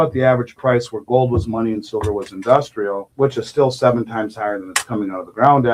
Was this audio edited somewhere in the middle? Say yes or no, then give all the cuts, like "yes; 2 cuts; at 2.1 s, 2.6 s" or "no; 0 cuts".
no; 0 cuts